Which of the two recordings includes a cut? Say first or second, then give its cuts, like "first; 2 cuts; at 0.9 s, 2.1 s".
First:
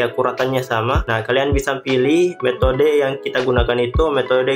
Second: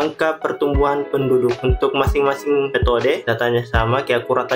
second; 1 cut; at 3.2 s